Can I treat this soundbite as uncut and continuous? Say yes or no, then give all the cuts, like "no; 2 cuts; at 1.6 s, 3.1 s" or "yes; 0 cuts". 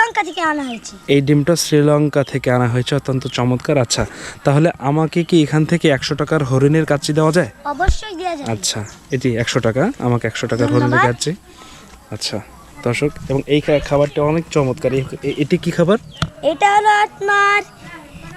yes; 0 cuts